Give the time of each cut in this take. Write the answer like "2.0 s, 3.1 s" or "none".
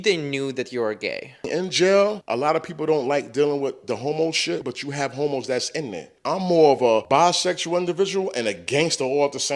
1.5 s, 2.2 s, 4.6 s, 6.1 s, 7.0 s